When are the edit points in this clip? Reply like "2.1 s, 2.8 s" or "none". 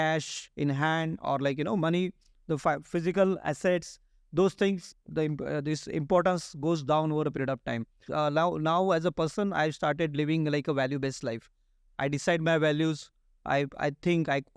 4.9 s, 8.0 s